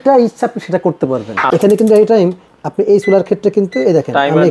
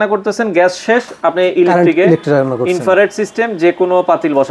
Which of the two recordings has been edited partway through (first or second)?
first